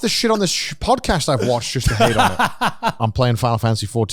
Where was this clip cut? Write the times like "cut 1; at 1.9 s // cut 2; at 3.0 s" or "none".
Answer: cut 1; at 3.0 s

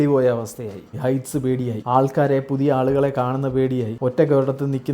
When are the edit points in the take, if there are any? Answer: cut 1; at 0.9 s

